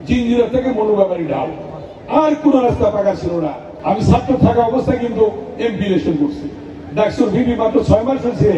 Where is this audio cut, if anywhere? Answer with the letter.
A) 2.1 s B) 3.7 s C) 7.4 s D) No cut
B